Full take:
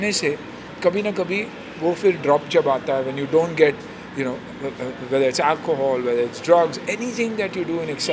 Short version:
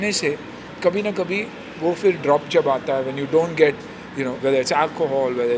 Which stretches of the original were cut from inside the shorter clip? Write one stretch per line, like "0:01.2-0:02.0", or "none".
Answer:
0:04.4-0:05.0